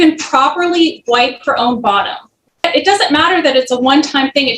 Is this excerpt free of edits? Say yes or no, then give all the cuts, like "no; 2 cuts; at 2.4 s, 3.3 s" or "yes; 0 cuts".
no; 1 cut; at 2.6 s